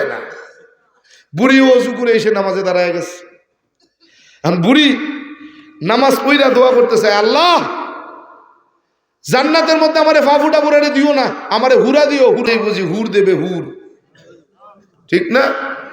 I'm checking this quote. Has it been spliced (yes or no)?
yes